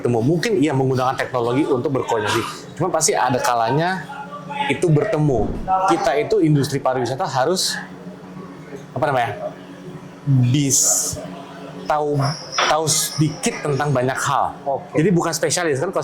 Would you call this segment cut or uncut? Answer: cut